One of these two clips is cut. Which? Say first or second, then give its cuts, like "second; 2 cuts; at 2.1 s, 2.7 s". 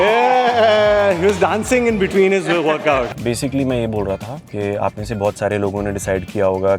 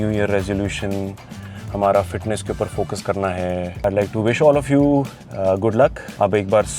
first; 1 cut; at 3.1 s